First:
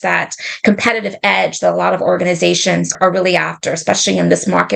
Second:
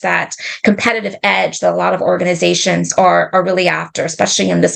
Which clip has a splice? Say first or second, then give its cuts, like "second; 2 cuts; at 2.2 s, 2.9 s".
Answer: first; 1 cut; at 2.9 s